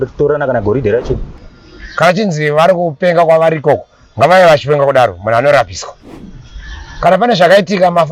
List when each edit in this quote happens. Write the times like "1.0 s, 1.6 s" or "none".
1.3 s